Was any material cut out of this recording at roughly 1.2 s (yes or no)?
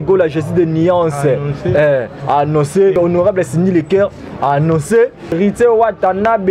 no